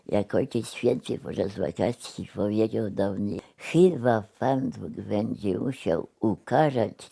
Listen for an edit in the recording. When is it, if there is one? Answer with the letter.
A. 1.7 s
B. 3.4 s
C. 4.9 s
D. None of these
B